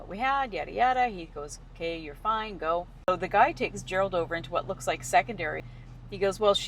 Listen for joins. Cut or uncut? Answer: cut